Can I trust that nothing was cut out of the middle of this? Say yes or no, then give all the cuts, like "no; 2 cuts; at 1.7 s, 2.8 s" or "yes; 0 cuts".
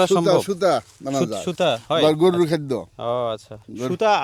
yes; 0 cuts